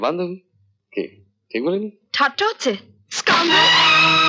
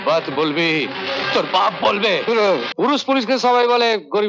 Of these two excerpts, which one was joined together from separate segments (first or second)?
second